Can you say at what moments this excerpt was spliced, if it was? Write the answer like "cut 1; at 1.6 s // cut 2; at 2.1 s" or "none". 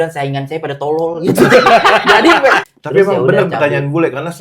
cut 1; at 2.7 s